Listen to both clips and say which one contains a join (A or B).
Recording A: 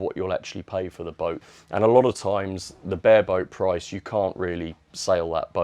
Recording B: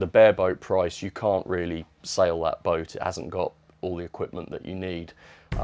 A